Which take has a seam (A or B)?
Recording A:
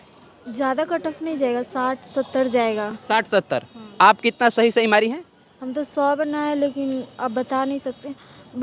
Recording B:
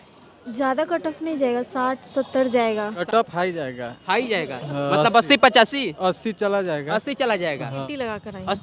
B